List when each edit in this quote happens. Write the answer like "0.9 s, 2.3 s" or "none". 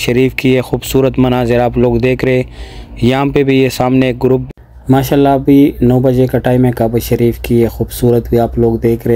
4.4 s